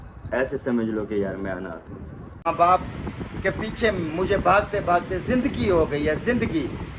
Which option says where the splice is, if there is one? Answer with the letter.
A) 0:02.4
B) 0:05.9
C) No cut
A